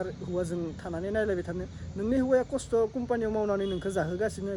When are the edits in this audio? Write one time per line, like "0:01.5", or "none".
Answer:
none